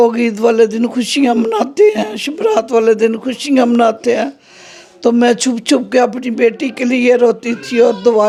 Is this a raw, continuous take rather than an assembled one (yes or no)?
yes